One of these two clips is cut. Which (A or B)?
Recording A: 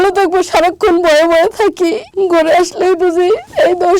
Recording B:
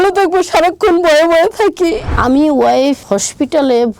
B